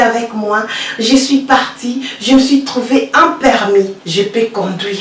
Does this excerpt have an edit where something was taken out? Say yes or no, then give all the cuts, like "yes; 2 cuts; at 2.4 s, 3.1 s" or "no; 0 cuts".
yes; 1 cut; at 4.0 s